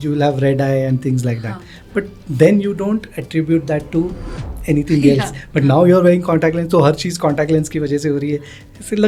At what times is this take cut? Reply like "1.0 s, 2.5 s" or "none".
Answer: none